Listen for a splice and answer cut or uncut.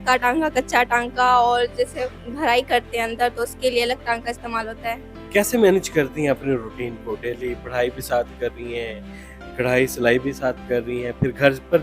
uncut